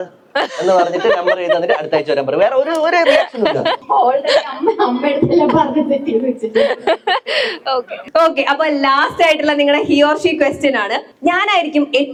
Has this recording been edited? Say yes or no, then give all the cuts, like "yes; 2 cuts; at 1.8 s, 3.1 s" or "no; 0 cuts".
no; 0 cuts